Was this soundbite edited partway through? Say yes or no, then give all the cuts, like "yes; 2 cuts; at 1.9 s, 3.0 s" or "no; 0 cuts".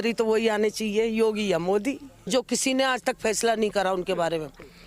yes; 1 cut; at 2.2 s